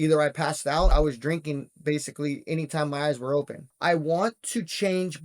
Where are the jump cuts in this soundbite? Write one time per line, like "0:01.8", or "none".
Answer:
0:00.9
0:03.6

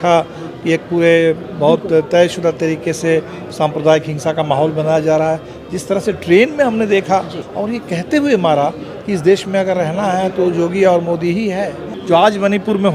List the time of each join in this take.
0:07.4
0:11.9

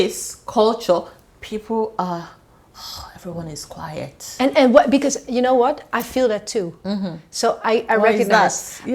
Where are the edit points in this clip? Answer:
none

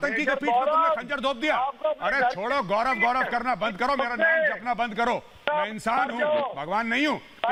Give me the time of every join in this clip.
none

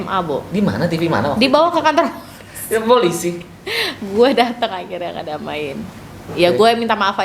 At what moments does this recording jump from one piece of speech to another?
none

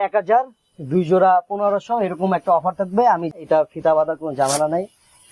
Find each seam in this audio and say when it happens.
0:03.4

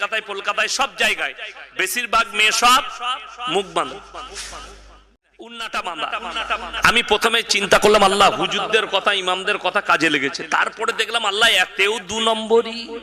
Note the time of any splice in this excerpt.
0:04.9

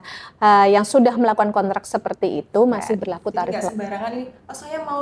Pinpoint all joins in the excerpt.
0:03.6

